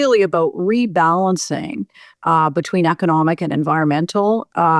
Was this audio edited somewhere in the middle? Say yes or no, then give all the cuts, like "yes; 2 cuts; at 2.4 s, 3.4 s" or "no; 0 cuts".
no; 0 cuts